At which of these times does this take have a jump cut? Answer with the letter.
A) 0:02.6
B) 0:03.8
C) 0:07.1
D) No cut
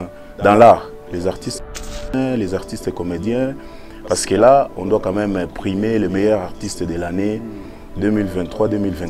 D